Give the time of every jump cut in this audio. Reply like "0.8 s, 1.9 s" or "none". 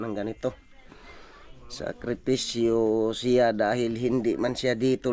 none